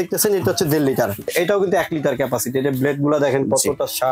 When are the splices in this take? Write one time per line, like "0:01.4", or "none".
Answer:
0:01.3